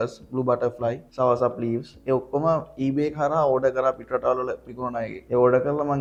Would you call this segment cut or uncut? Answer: uncut